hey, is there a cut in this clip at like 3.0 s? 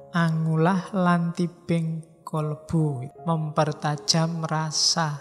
yes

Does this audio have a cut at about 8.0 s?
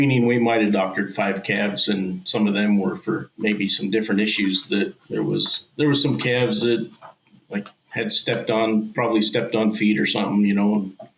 no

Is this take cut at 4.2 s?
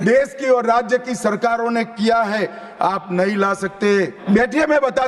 yes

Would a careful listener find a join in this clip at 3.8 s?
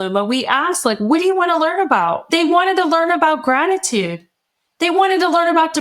no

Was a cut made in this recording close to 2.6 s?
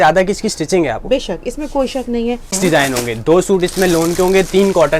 yes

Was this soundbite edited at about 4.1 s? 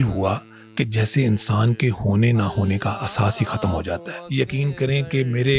yes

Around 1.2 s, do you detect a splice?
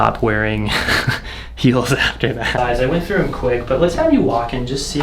no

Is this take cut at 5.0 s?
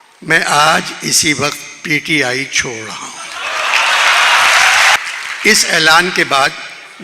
yes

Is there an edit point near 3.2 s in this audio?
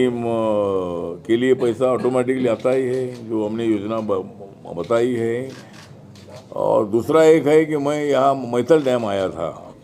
no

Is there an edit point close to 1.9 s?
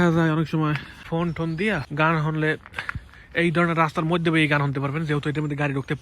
yes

